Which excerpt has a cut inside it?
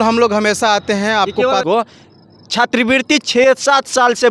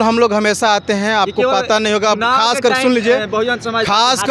first; 1 cut; at 1.6 s

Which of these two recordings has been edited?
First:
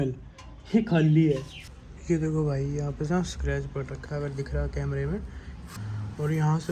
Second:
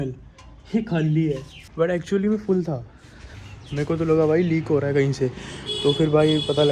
first; 2 cuts; at 1.7 s, 5.6 s

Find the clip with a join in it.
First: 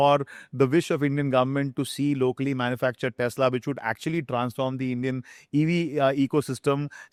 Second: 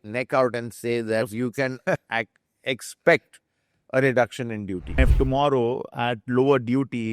second; 1 cut; at 4.9 s

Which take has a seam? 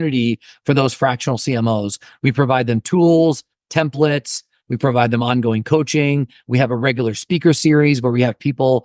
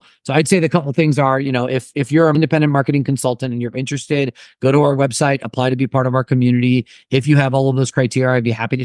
second; 1 cut; at 2.3 s

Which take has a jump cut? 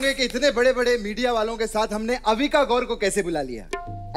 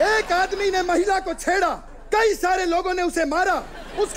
second; 1 cut; at 1.9 s

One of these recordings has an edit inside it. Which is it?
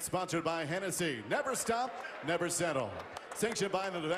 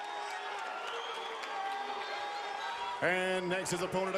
first; 1 cut; at 2.3 s

